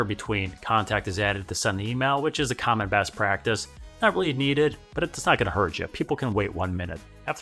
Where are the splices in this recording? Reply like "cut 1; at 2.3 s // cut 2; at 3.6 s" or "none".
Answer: none